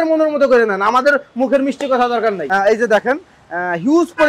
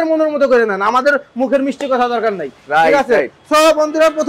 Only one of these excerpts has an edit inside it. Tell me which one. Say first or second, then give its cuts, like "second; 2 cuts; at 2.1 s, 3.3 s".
first; 1 cut; at 2.4 s